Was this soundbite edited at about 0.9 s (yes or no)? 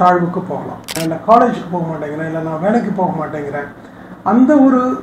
yes